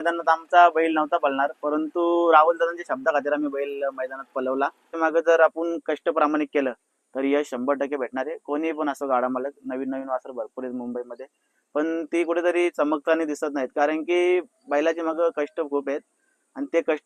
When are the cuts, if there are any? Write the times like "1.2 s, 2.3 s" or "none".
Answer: 4.9 s